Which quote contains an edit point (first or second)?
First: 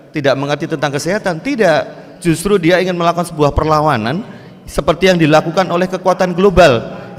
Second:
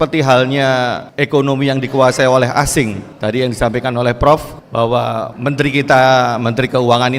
second